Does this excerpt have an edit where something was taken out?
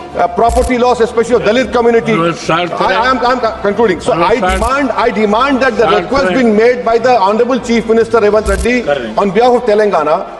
no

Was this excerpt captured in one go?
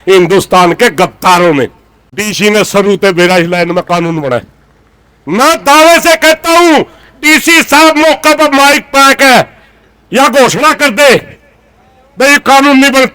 yes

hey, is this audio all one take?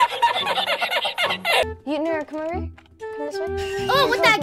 no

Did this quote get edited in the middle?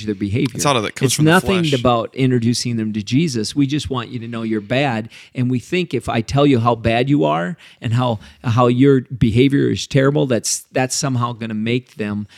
no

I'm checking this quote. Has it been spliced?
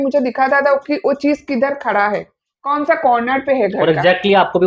no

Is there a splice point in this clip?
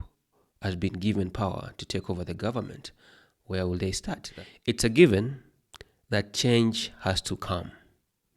yes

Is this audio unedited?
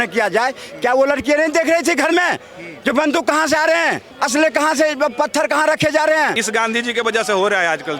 no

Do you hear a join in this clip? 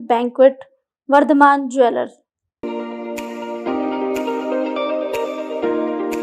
yes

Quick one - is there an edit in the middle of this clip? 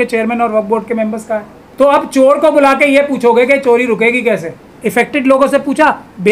yes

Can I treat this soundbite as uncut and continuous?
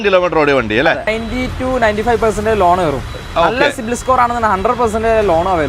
no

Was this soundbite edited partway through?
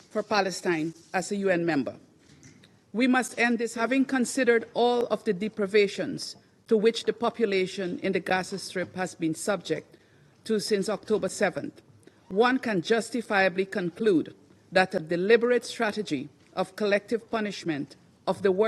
yes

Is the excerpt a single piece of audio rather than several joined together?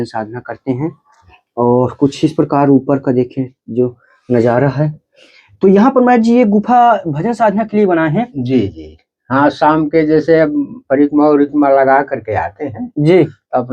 yes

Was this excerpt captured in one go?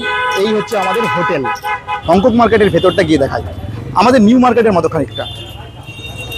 yes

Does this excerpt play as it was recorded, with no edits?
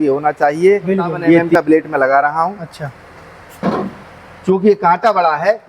no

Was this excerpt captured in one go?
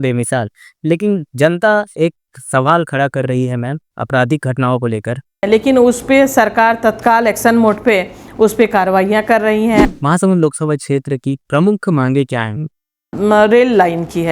no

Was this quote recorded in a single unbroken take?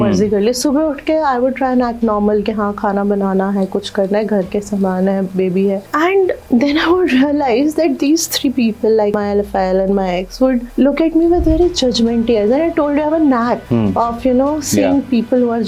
yes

